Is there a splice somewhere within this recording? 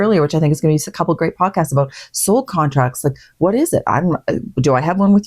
no; 0 cuts

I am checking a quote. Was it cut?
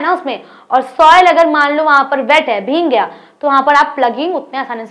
no; 0 cuts

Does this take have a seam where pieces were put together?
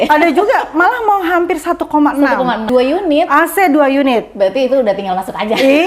yes; 1 cut; at 2.6 s

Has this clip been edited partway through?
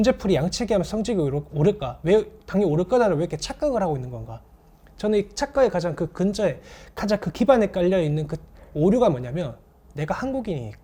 no; 0 cuts

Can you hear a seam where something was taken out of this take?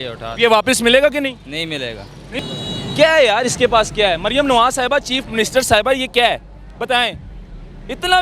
yes; 1 cut; at 2.4 s

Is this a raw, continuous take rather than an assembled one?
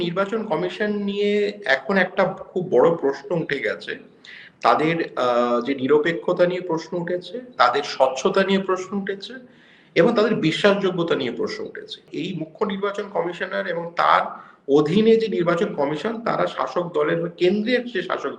no; 1 cut; at 12.0 s

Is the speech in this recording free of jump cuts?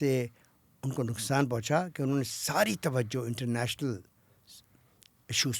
yes; 0 cuts

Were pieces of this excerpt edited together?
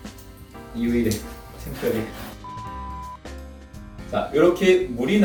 no; 0 cuts

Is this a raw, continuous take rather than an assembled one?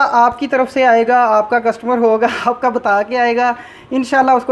yes; 0 cuts

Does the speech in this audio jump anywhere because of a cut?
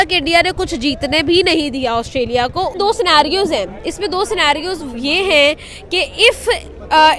yes; 1 cut; at 2.8 s

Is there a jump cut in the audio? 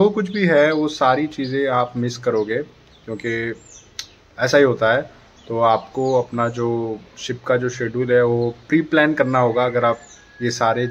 no; 0 cuts

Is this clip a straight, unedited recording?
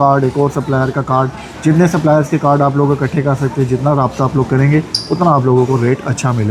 yes; 0 cuts

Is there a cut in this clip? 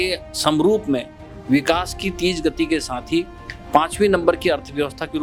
no; 0 cuts

